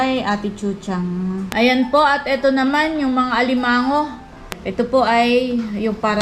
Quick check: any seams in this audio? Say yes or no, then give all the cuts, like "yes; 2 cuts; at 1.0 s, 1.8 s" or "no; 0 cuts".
yes; 2 cuts; at 1.5 s, 4.6 s